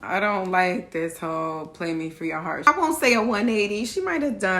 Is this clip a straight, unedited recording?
no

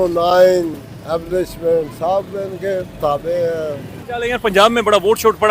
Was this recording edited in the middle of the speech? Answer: yes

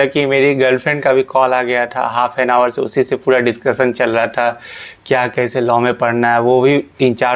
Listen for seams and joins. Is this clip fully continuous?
yes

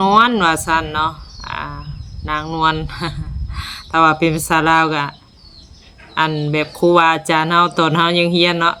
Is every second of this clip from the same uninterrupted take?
yes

